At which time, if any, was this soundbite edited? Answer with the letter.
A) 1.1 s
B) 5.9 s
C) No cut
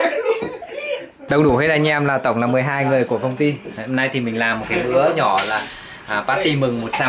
A